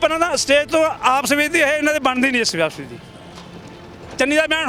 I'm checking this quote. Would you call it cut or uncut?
uncut